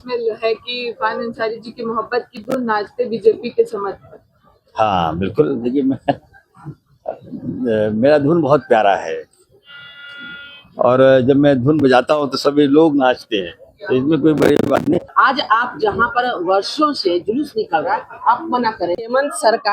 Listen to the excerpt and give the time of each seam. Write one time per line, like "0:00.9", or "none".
0:15.1
0:19.0